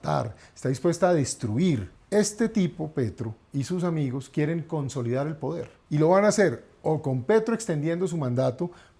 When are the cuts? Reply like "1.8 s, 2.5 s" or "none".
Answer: 1.9 s, 5.7 s